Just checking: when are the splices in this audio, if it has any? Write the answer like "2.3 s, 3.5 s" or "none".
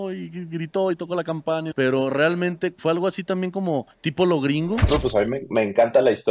1.7 s, 2.8 s, 4.0 s, 4.9 s

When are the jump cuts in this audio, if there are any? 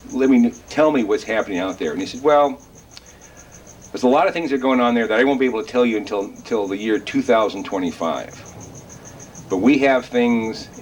none

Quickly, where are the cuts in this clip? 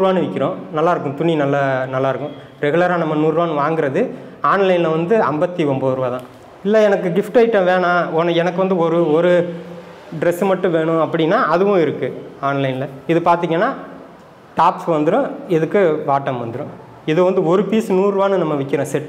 6.3 s

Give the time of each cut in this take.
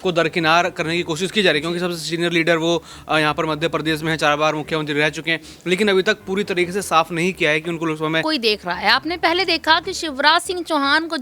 8.2 s

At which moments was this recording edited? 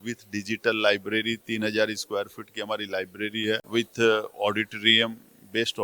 3.6 s

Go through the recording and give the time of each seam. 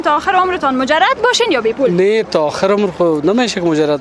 none

